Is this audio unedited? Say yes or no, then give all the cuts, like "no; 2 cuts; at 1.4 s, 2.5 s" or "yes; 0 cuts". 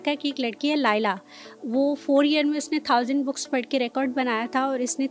yes; 0 cuts